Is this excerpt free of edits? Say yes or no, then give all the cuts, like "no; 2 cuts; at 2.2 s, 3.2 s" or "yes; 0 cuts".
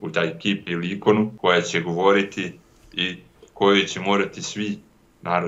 no; 1 cut; at 1.3 s